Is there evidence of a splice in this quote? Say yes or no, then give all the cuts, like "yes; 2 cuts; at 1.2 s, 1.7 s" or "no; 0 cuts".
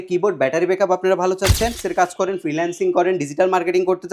yes; 1 cut; at 1.8 s